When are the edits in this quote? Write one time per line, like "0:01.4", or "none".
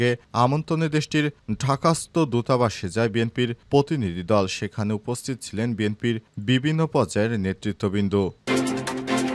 0:08.4